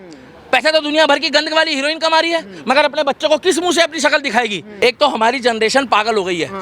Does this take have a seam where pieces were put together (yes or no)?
yes